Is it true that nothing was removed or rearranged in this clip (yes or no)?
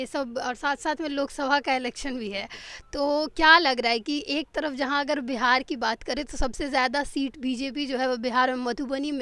yes